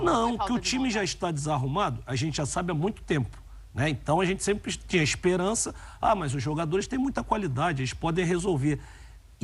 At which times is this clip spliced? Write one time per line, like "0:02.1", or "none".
none